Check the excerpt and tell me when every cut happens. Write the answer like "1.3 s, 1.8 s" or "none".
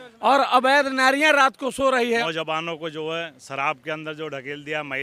2.2 s